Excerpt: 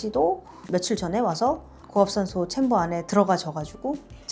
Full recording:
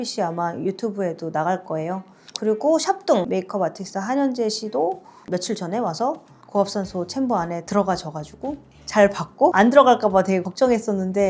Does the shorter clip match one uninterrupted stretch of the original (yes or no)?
yes